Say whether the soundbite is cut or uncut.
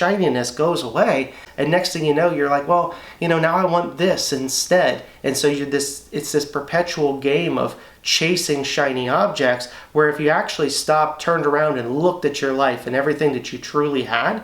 cut